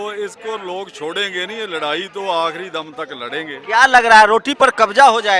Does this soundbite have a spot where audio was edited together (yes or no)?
no